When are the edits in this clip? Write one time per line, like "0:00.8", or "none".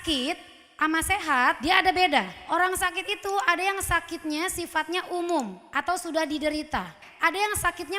0:01.6
0:02.4